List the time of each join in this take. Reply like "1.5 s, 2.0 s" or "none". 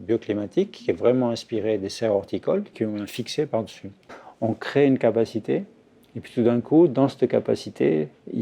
2.7 s, 4.1 s